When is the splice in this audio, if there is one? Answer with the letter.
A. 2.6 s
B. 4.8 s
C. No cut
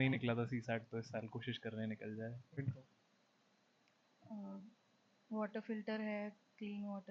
A